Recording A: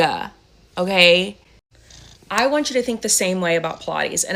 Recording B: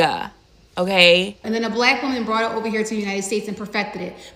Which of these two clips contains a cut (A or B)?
B